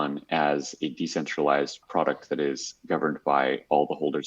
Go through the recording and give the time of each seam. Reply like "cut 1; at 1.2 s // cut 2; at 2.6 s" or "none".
cut 1; at 1.8 s